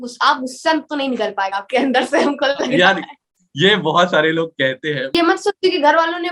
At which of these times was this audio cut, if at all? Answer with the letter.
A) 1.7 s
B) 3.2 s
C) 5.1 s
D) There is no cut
C